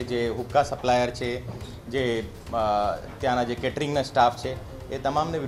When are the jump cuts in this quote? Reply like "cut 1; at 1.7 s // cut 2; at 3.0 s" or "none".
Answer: none